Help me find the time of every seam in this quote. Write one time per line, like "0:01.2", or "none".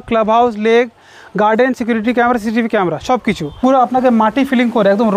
0:03.6